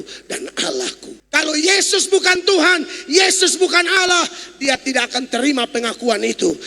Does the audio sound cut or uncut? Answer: cut